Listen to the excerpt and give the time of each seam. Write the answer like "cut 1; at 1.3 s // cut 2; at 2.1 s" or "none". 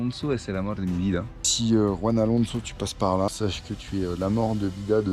cut 1; at 1.5 s // cut 2; at 3.3 s